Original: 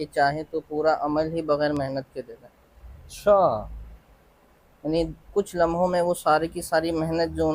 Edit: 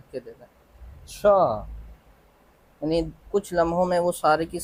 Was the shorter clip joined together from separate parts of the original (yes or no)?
no